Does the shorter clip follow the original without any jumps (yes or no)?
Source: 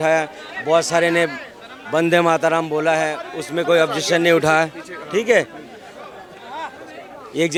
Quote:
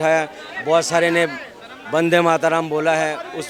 yes